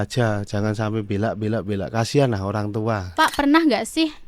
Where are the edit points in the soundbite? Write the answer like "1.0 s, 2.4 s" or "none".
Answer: 3.1 s

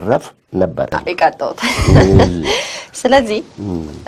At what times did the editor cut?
1.0 s

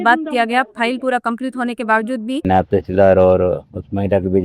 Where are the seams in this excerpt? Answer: 2.4 s

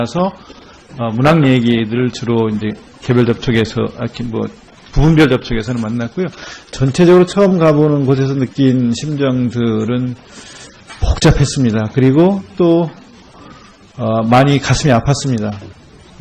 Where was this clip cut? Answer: 7.2 s

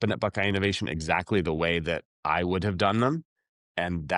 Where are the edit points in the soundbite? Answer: none

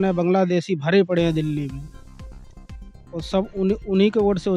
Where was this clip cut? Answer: none

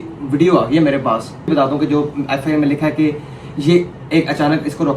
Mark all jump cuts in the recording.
1.5 s

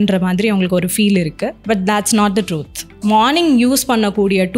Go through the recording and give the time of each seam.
1.5 s, 3.0 s

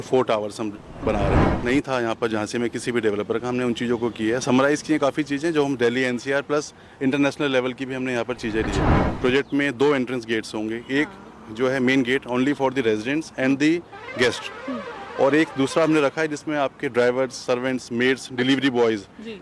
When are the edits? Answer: 1.5 s, 9.0 s

